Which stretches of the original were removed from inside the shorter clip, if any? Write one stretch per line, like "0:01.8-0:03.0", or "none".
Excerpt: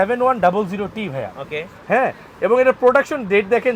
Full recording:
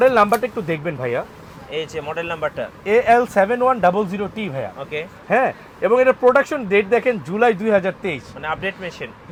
none